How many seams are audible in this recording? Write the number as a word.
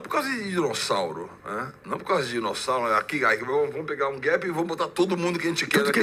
zero